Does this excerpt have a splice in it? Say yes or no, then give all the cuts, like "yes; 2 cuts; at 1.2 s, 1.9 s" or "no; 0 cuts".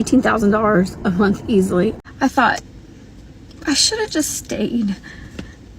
yes; 1 cut; at 1.9 s